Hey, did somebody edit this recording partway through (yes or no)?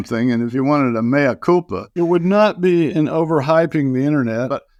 no